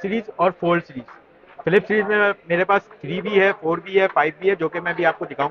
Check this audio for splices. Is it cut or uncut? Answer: uncut